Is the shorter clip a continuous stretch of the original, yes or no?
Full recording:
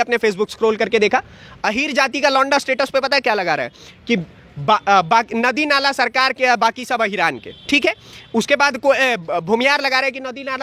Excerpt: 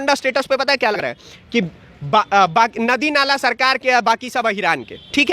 no